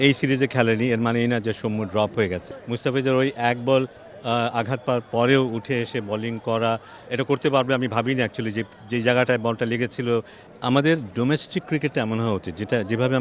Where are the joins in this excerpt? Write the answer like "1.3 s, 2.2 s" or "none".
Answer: 2.5 s, 7.0 s, 10.4 s